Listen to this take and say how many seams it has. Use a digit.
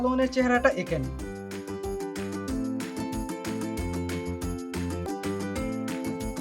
1